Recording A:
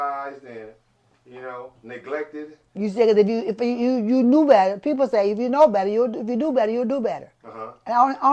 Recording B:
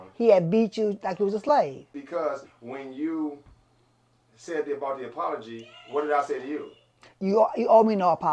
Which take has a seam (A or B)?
B